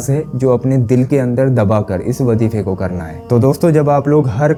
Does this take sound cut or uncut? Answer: uncut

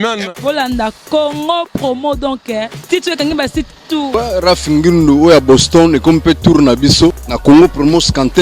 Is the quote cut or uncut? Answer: cut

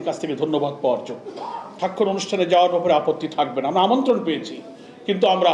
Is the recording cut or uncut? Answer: cut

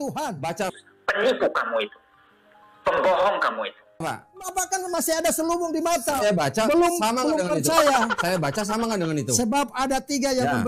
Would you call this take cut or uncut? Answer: uncut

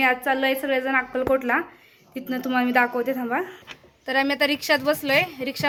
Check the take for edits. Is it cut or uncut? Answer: uncut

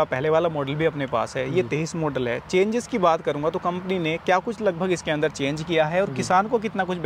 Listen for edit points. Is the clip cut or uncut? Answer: uncut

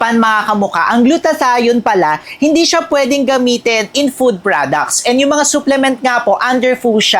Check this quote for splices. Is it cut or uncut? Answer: uncut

